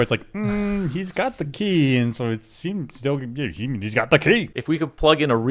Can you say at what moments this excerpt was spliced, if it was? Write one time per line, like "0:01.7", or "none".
0:04.5